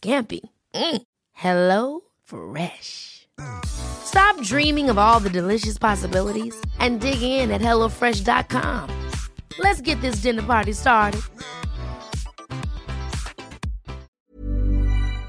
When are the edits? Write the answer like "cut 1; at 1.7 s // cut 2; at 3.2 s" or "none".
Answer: cut 1; at 14.2 s